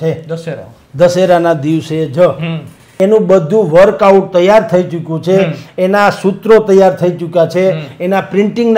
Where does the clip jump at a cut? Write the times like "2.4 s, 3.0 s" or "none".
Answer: 2.8 s